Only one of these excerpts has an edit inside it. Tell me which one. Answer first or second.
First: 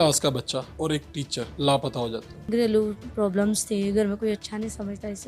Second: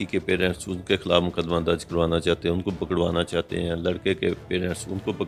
first